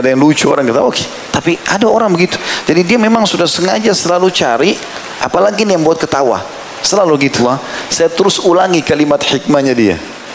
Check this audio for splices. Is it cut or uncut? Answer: cut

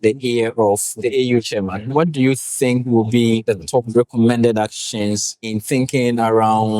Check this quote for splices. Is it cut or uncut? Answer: cut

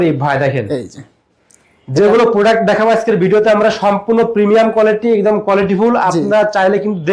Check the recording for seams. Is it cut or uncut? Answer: uncut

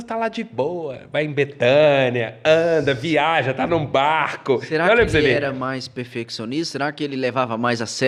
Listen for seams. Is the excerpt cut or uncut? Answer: uncut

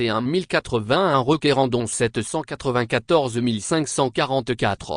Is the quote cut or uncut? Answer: uncut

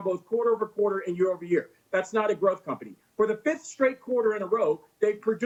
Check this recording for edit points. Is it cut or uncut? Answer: uncut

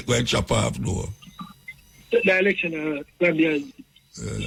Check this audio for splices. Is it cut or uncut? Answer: uncut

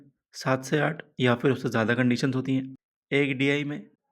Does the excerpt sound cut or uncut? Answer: cut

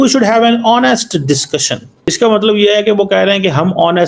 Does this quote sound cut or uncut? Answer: cut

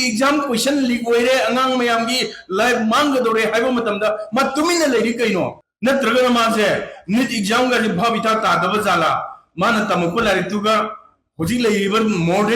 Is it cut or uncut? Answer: cut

